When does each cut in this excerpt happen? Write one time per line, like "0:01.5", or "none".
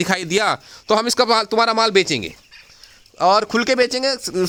none